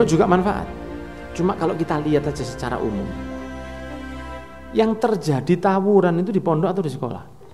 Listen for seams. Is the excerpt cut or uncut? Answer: uncut